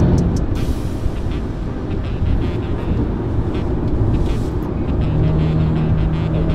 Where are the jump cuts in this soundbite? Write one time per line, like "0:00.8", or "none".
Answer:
none